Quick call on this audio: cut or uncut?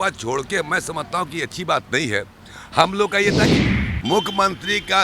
cut